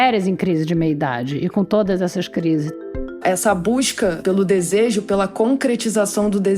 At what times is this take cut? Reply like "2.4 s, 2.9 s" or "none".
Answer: 3.0 s, 4.2 s